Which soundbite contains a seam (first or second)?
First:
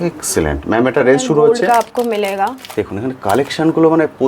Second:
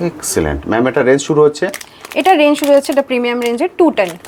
first